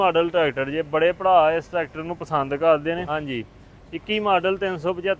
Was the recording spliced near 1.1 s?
no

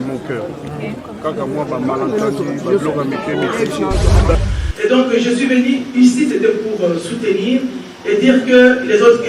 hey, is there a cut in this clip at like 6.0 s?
no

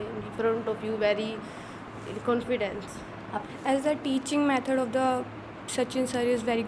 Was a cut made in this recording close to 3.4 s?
yes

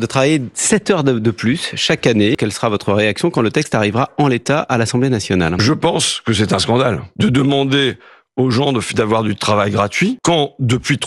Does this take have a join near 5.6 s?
yes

